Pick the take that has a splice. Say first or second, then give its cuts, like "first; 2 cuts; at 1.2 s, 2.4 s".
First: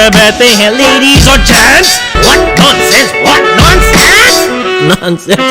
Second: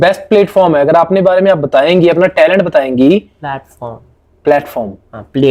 first; 1 cut; at 2.0 s